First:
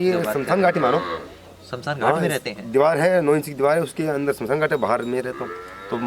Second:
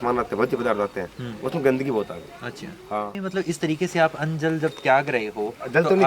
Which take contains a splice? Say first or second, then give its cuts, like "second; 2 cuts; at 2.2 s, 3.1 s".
second; 1 cut; at 3.2 s